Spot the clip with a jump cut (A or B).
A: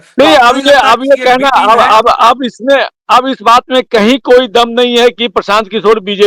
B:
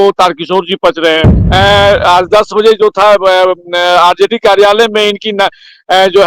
B